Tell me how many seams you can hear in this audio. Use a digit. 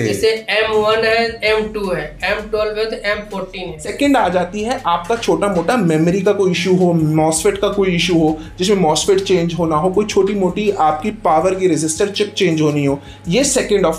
1